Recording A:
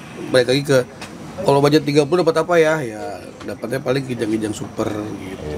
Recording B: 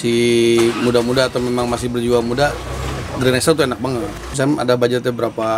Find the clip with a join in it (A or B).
B